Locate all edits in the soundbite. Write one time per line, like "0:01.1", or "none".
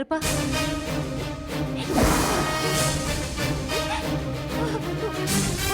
none

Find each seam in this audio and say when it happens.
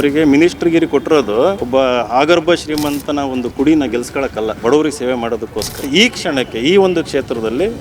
0:01.6
0:04.6
0:05.8

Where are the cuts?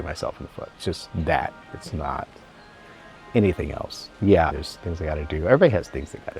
0:04.7

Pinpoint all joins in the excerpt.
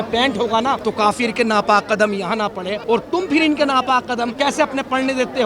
0:00.8
0:02.7
0:04.3

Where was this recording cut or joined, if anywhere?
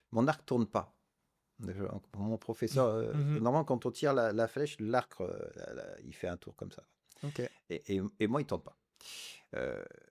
none

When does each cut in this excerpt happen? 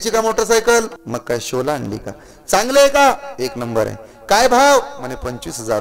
0:01.0

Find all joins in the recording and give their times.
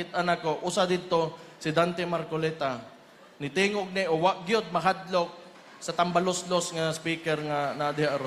none

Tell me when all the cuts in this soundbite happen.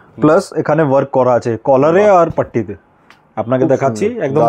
none

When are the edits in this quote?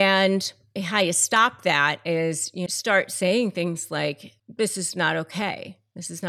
0:02.7

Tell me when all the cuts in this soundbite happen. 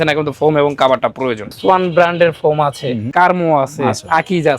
0:01.5
0:03.1

